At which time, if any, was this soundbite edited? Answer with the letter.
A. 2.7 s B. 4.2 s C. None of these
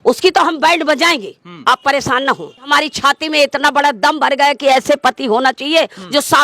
A